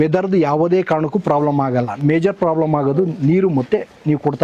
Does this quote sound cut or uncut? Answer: uncut